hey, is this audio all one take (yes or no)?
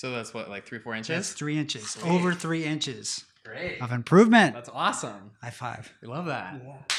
yes